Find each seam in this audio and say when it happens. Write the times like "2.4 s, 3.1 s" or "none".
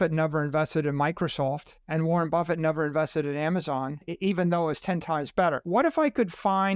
1.7 s, 4.1 s, 5.6 s